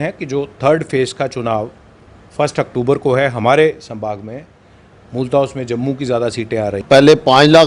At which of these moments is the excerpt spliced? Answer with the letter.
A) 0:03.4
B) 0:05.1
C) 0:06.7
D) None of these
C